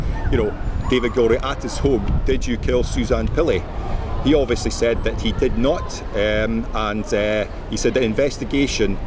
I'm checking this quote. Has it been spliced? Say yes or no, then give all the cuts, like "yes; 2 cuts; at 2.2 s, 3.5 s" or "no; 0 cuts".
no; 0 cuts